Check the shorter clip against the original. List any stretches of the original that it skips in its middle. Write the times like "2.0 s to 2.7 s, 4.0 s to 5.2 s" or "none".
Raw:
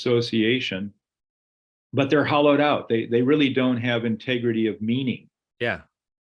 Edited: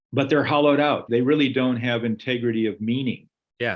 2.8 s to 3.0 s